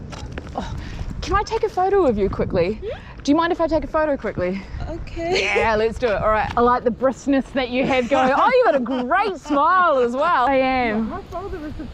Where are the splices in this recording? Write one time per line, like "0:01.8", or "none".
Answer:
0:06.5
0:10.5